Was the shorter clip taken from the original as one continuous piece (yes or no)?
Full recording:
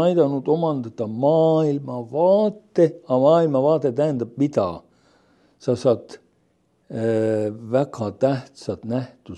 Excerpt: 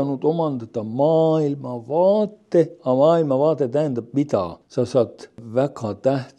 no